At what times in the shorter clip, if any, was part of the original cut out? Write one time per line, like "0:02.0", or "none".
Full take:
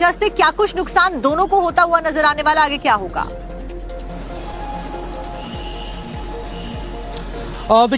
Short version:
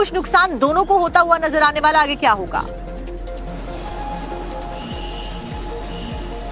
none